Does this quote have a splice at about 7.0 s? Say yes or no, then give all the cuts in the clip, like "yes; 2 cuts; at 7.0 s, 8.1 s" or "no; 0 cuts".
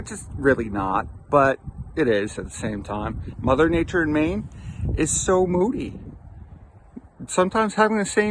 no; 1 cut; at 3.3 s